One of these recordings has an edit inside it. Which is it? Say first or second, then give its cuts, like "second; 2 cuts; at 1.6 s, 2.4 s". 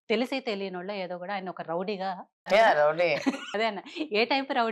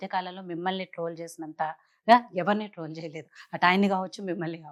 first; 2 cuts; at 2.4 s, 3.4 s